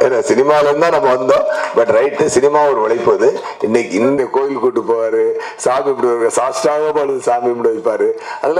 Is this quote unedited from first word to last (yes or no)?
no